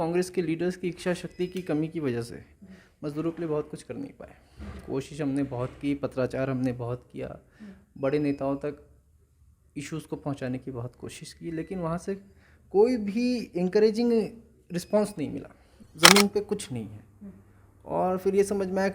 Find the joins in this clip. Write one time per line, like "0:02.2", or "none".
0:15.8